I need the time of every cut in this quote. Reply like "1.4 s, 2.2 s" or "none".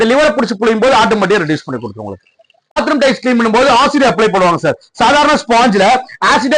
2.8 s

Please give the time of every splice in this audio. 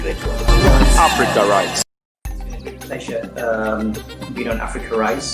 1.9 s

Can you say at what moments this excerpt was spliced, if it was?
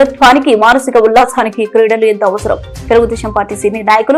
none

